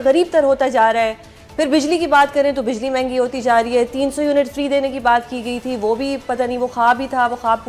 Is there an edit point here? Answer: no; 0 cuts

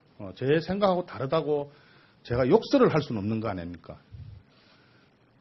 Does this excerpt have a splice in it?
yes; 1 cut; at 3.9 s

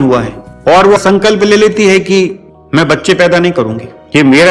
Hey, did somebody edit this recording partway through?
yes; 1 cut; at 1.0 s

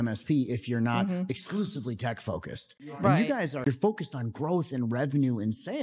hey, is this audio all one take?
no; 1 cut; at 3.6 s

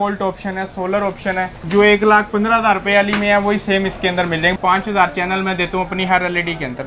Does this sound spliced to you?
yes; 2 cuts; at 1.6 s, 4.5 s

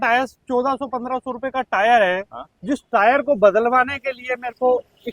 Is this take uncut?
yes; 0 cuts

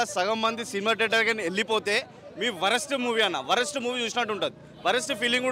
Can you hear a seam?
no; 0 cuts

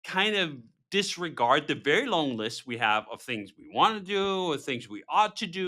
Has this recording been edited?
no; 0 cuts

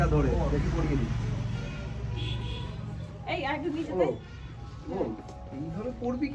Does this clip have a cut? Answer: no; 0 cuts

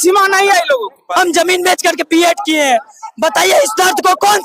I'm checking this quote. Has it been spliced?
yes; 1 cut; at 1.0 s

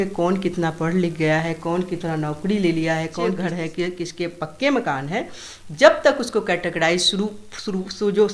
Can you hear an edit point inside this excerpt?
yes; 1 cut; at 3.4 s

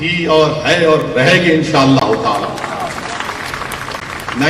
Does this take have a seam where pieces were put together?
no; 0 cuts

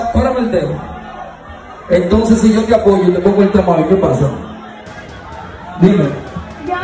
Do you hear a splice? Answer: no; 0 cuts

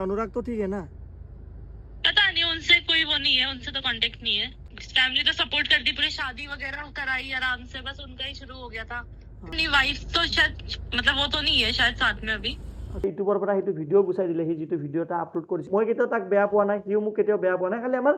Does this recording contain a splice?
yes; 4 cuts; at 4.6 s, 9.5 s, 13.0 s, 15.6 s

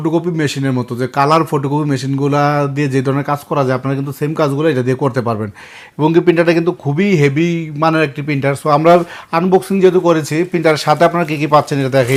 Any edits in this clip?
no; 0 cuts

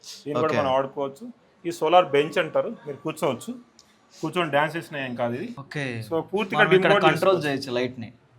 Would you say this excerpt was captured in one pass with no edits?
no; 1 cut; at 5.6 s

